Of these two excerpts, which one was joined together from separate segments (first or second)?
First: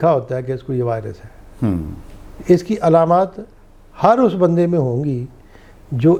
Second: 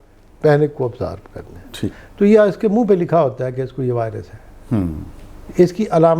second